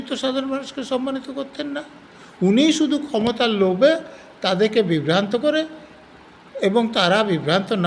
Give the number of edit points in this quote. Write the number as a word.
zero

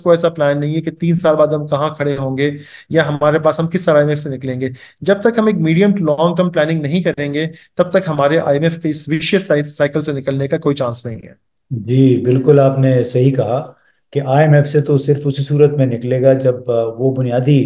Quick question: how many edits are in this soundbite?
zero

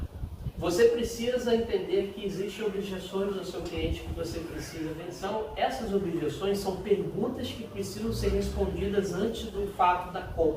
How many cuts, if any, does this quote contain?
one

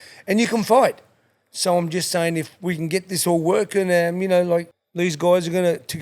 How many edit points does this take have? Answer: one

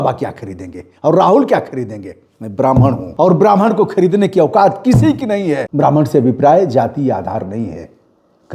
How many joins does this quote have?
two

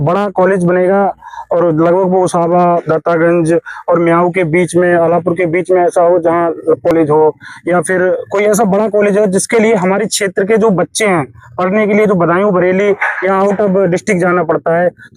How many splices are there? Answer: one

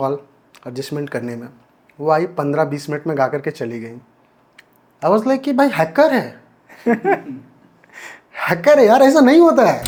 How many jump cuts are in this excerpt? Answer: zero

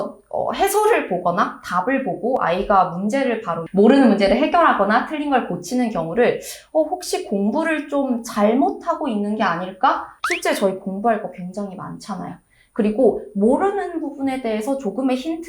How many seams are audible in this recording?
one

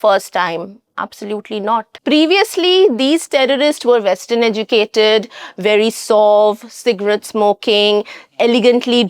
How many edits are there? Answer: one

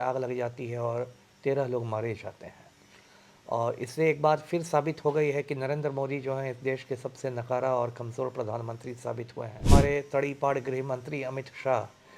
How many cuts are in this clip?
one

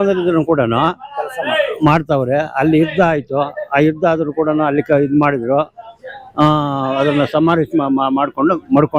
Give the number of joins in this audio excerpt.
zero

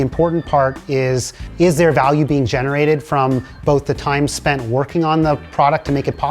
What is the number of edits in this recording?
one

